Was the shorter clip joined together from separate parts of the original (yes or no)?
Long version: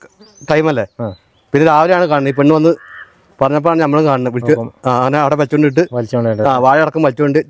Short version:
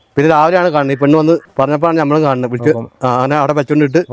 yes